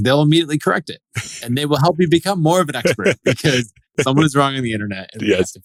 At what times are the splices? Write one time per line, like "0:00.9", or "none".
none